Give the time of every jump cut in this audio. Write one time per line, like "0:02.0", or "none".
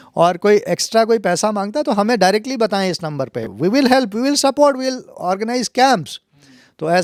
none